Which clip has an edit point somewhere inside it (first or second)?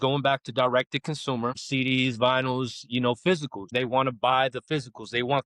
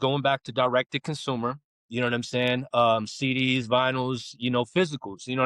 first